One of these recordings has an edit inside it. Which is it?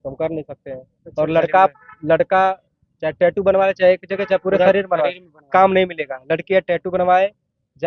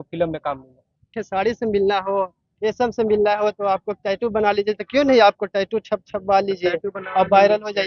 second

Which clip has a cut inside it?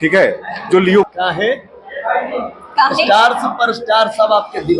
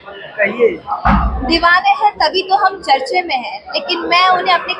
first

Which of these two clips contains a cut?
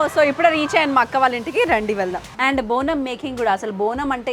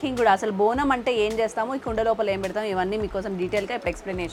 first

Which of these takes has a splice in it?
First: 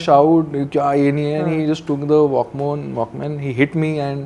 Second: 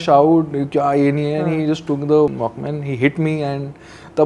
second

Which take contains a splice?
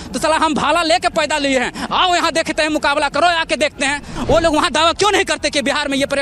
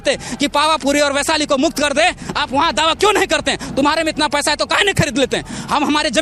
first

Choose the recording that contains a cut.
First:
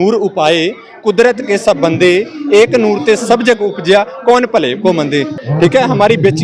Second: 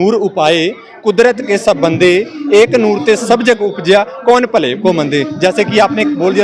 first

